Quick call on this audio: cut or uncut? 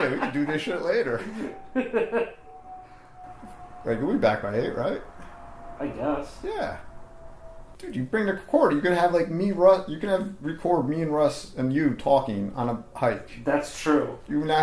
uncut